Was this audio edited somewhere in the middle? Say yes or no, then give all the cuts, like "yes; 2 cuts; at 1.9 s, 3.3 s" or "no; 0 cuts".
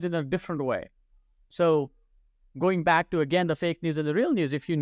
no; 0 cuts